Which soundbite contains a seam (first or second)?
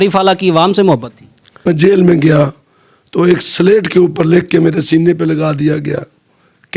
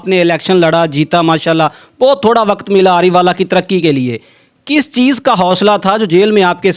first